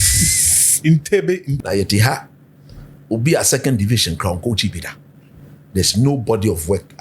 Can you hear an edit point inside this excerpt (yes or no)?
yes